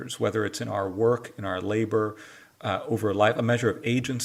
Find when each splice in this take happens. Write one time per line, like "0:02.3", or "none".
none